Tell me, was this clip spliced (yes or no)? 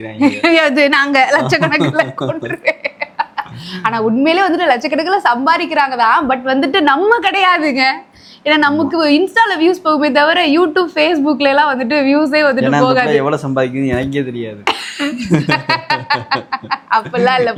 no